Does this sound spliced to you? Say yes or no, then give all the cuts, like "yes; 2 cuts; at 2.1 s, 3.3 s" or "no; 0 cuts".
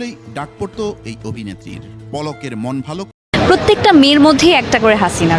yes; 1 cut; at 3.1 s